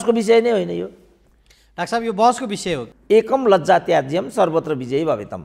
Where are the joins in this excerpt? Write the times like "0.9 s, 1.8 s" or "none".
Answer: 2.9 s